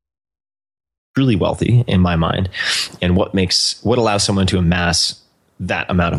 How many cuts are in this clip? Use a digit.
1